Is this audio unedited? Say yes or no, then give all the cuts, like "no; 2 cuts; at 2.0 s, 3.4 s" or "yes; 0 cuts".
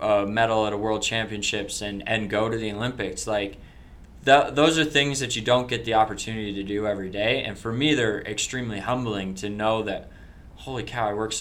yes; 0 cuts